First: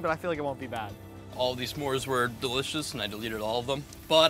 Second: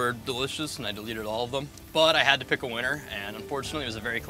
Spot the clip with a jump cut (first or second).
first